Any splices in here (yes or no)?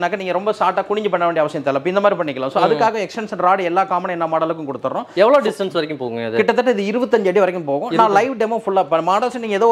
no